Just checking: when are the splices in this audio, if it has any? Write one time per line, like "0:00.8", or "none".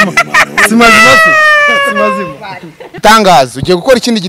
0:03.0